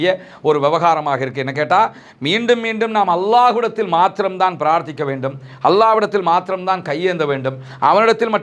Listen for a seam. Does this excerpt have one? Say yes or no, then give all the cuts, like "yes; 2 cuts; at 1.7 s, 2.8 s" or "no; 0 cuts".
no; 0 cuts